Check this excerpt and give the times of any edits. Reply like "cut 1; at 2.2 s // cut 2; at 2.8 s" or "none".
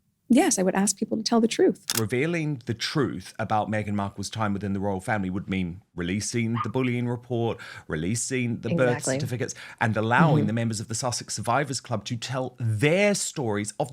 cut 1; at 1.9 s